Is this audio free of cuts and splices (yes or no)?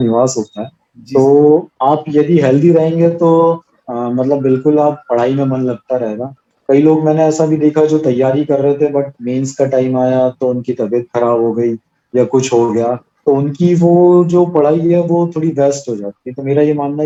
yes